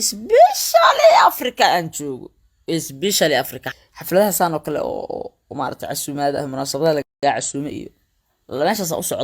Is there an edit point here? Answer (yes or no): yes